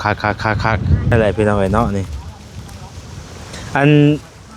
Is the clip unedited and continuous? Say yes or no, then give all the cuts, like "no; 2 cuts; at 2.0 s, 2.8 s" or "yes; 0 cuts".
no; 1 cut; at 1.1 s